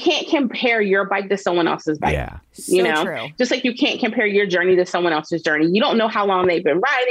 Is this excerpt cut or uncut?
uncut